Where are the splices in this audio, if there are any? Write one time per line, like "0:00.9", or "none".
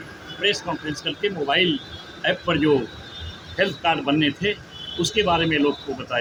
none